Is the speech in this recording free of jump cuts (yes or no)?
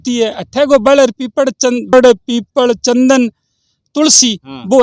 no